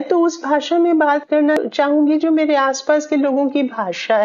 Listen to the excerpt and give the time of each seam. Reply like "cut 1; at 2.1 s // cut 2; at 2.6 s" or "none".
cut 1; at 1.6 s